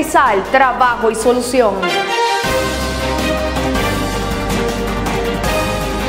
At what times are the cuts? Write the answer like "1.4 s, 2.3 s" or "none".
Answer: 1.9 s